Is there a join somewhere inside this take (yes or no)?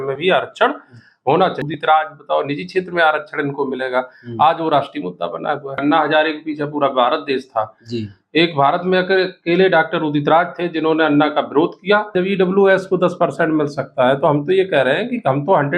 yes